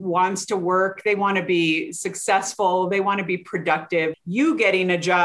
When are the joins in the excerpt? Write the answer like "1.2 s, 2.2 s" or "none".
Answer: 4.1 s